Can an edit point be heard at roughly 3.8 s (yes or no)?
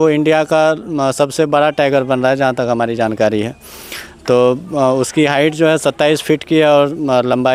no